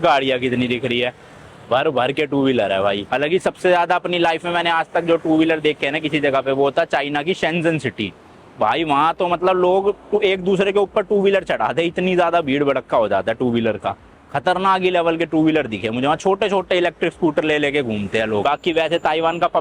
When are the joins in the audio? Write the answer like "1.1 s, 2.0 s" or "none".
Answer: none